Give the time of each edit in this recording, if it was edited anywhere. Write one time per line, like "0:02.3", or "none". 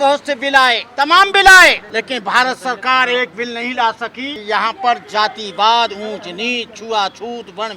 0:00.9
0:01.8
0:04.3